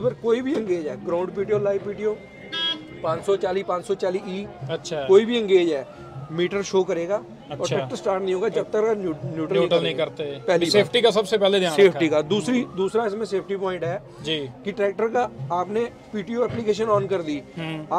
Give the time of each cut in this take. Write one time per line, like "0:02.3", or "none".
none